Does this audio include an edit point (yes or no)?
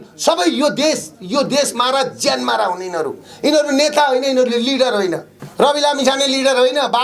yes